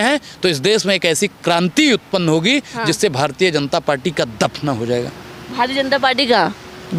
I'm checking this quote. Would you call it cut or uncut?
uncut